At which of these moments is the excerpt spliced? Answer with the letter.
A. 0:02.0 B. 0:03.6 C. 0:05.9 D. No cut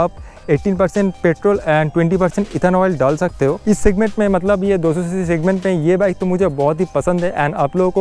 B